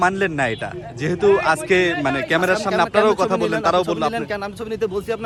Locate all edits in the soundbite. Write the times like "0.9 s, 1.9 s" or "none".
none

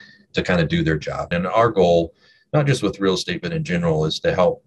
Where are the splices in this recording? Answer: 1.3 s

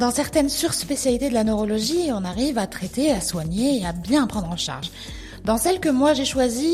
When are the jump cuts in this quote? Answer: none

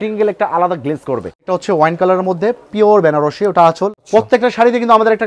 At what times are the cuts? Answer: 1.4 s, 4.0 s

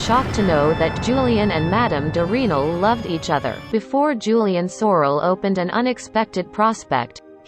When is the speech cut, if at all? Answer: 3.7 s

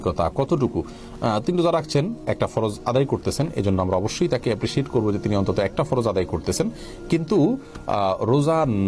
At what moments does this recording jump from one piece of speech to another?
none

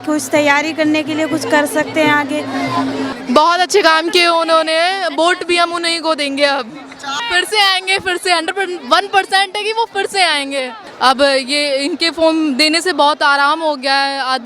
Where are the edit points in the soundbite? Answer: 3.1 s, 7.1 s, 10.8 s

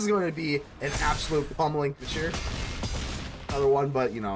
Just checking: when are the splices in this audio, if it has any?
2.1 s, 3.5 s

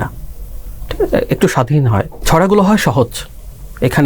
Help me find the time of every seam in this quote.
2.1 s

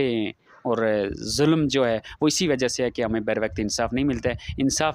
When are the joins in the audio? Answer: none

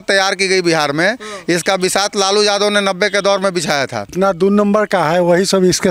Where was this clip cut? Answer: 4.1 s

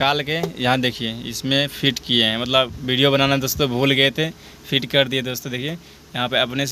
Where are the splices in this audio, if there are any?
none

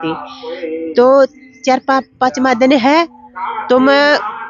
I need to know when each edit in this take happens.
none

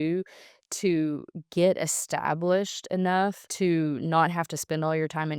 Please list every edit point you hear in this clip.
3.4 s

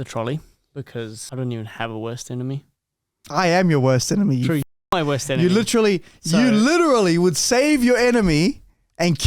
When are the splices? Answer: 1.2 s

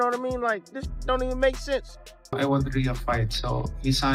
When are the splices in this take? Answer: 2.3 s

